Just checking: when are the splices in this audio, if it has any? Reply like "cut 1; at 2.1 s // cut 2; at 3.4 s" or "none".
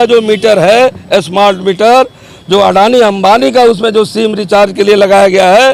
none